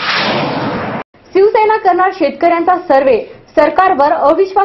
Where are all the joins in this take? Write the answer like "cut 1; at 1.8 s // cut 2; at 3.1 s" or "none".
cut 1; at 1.1 s